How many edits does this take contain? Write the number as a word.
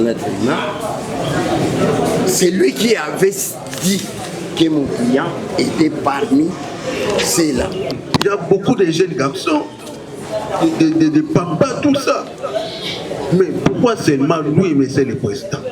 one